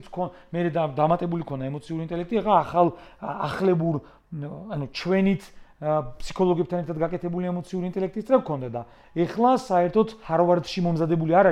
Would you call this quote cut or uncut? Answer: cut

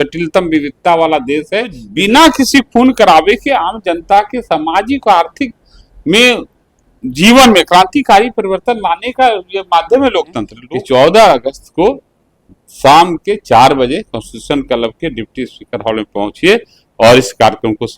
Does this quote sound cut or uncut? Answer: cut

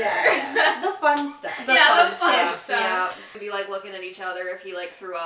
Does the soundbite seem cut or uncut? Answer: cut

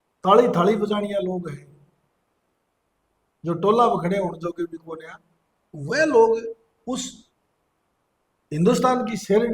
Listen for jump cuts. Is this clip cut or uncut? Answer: uncut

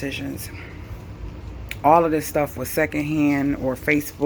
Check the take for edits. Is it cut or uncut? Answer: uncut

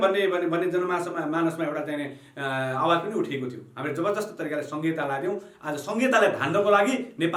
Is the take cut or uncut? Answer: uncut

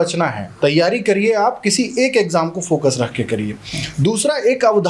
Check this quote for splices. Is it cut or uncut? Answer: uncut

